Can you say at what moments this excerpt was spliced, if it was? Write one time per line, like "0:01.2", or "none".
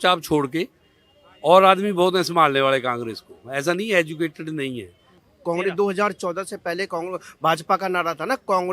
0:05.3